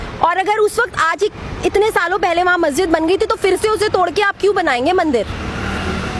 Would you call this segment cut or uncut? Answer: uncut